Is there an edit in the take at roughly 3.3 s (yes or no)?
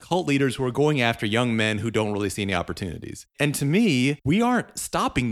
yes